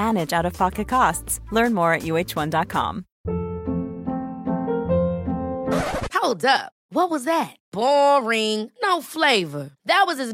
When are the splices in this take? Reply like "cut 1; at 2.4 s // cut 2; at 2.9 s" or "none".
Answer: cut 1; at 3.1 s